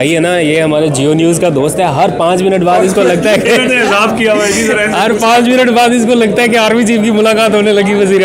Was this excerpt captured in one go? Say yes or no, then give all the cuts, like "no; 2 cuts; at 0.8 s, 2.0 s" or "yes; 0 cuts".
yes; 0 cuts